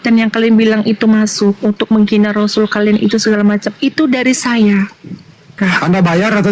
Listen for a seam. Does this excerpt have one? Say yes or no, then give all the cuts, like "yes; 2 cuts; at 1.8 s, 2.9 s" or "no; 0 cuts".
yes; 1 cut; at 5.6 s